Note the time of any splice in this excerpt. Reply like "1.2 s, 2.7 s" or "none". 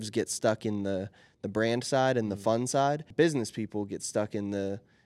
3.1 s